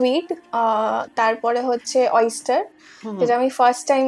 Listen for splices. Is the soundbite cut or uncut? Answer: uncut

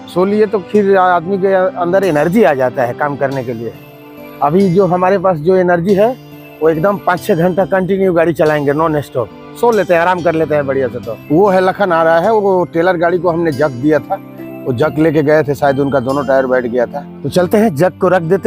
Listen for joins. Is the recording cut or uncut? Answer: uncut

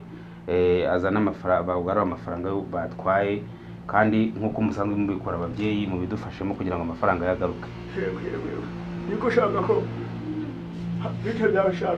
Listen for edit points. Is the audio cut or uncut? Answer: uncut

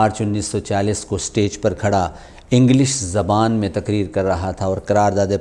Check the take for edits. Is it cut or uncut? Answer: uncut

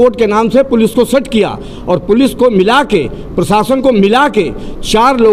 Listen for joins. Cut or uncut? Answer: uncut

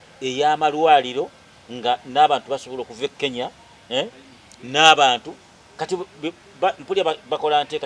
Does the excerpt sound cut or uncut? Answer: uncut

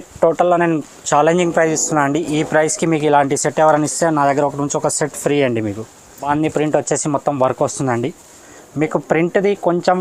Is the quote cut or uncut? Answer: cut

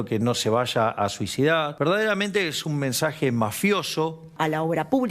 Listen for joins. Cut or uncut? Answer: cut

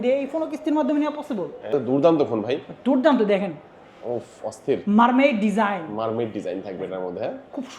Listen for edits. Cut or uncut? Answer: cut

